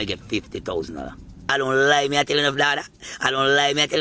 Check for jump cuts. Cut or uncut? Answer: cut